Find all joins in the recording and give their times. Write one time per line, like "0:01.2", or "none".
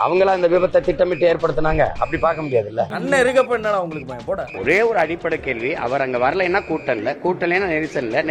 0:02.9
0:04.5